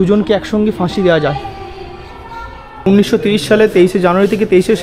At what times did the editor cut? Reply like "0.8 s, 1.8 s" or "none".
2.9 s